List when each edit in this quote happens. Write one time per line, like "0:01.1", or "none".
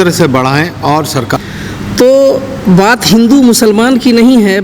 0:01.3

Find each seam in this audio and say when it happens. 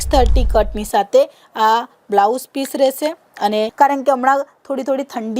0:03.7

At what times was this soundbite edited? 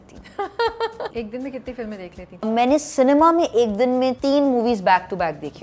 0:01.1
0:02.4
0:04.2

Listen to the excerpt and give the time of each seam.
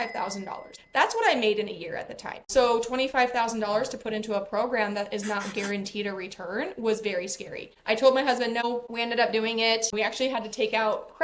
0:02.4

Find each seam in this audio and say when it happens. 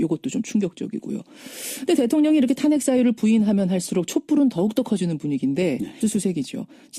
none

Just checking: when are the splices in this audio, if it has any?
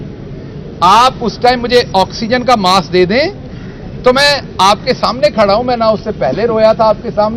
none

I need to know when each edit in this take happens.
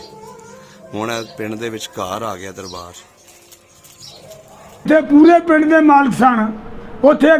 0:04.9

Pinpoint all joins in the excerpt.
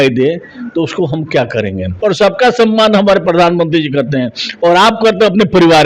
0:01.9

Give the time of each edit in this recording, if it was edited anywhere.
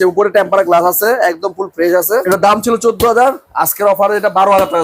0:02.2

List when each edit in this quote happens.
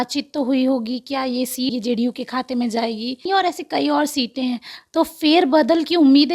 0:01.7
0:03.3

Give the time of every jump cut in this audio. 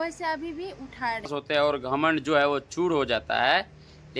0:01.3

